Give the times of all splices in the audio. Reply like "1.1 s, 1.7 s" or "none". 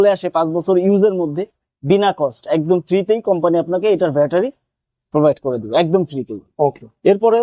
none

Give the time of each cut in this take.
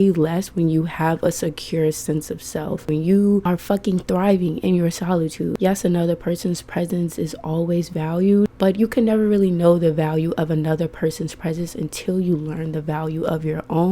2.8 s, 3.4 s, 5.5 s, 8.5 s

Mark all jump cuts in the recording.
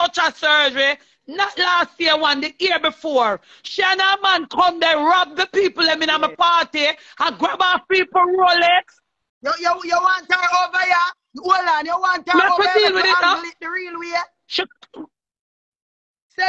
none

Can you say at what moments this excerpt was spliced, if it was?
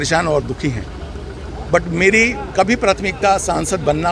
1.4 s

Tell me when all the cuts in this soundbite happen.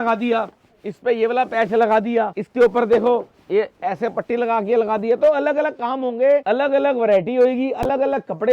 2.4 s, 6.4 s

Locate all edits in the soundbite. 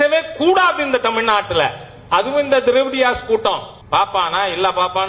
3.7 s

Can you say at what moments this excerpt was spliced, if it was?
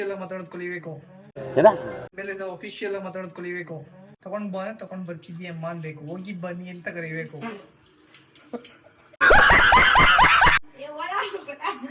none

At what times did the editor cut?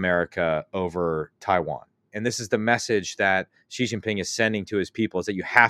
2.1 s

